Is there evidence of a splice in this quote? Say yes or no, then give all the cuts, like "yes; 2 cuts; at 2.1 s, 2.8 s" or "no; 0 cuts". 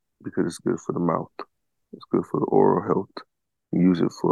no; 0 cuts